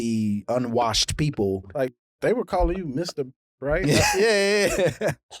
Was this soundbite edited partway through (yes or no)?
yes